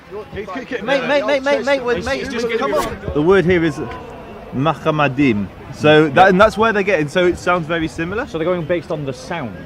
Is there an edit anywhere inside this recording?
yes; 1 cut; at 2.9 s

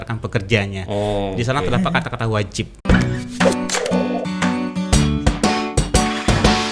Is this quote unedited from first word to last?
no; 1 cut; at 2.8 s

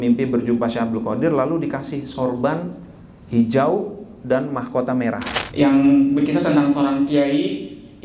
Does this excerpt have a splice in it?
yes; 1 cut; at 5.4 s

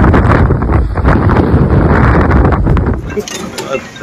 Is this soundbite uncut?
no; 1 cut; at 3.0 s

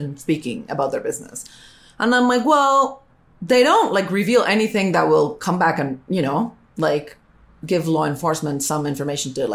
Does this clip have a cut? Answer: no; 0 cuts

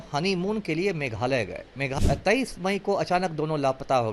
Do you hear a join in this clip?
yes; 1 cut; at 1.9 s

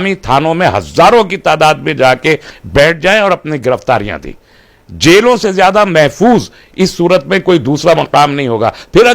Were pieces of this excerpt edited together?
no; 0 cuts

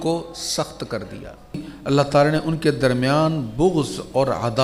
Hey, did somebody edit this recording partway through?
yes; 1 cut; at 1.7 s

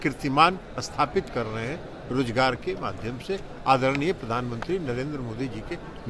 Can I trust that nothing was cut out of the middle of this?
yes; 0 cuts

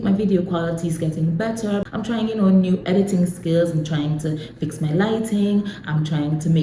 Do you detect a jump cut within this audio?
yes; 1 cut; at 1.8 s

